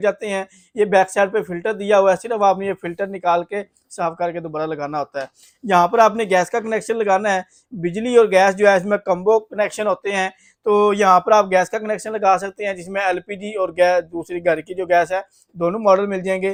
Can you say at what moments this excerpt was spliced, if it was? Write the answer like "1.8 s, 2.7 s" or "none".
none

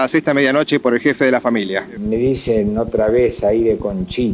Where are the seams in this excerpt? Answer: 1.9 s

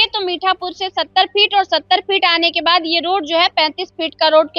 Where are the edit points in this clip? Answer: none

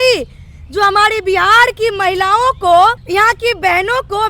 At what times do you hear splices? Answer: 3.0 s

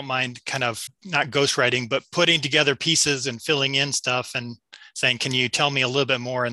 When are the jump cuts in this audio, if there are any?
0.9 s

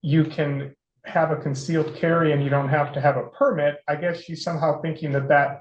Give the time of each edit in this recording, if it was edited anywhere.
none

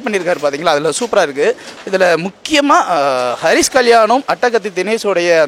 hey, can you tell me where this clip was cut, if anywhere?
1.7 s

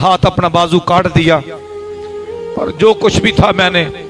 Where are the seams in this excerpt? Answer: none

